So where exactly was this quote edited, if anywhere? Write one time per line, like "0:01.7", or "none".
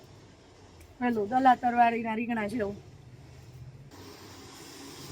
0:03.9